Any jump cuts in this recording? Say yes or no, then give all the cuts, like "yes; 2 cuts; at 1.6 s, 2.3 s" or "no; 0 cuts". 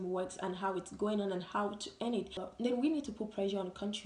yes; 1 cut; at 2.4 s